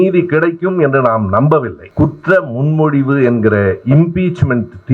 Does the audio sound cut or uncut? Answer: cut